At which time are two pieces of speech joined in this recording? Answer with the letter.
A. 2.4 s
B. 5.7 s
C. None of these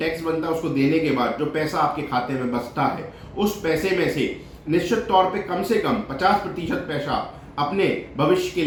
C